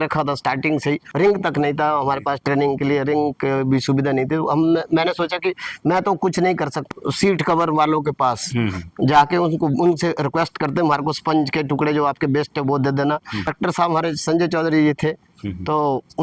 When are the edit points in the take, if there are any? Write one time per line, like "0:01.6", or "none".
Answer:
0:01.1
0:06.8
0:13.5

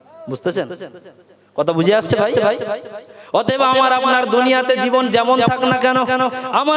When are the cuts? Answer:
none

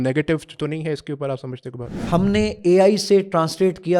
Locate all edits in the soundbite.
0:01.8

